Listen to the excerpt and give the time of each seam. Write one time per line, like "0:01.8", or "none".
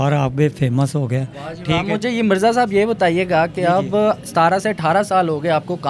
none